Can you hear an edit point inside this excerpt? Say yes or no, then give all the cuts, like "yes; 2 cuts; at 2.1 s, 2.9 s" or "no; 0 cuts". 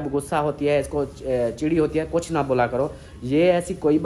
no; 0 cuts